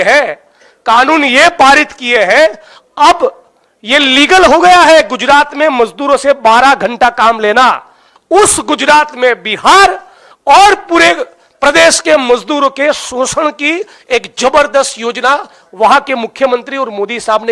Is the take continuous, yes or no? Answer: no